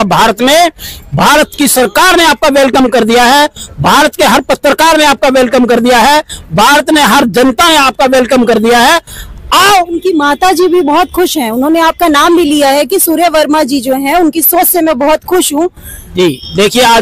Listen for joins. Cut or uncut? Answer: uncut